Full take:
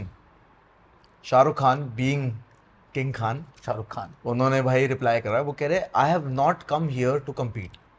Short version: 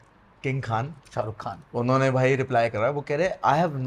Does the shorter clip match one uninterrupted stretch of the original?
yes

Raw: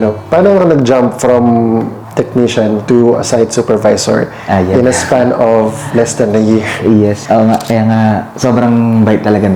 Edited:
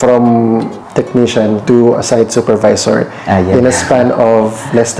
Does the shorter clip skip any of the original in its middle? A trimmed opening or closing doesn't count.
no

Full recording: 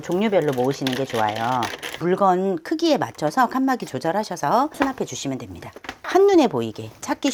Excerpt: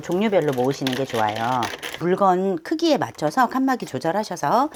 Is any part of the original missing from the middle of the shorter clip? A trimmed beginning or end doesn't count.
no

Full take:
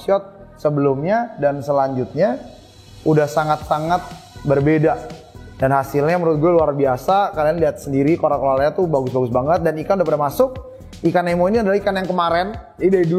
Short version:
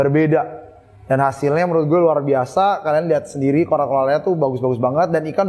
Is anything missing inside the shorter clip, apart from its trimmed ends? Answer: no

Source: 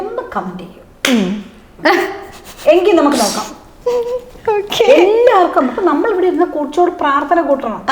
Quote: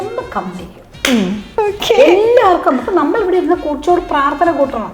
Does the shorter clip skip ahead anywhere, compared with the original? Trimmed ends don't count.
yes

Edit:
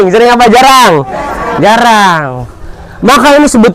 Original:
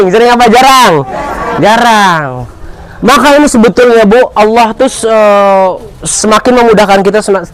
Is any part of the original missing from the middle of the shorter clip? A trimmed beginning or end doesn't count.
no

